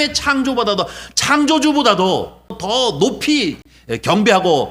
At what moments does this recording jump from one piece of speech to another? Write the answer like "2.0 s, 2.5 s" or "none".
2.6 s, 3.7 s